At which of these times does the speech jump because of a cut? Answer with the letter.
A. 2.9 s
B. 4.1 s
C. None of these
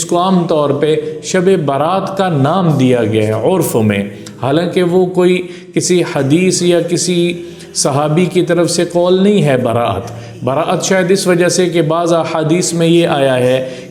C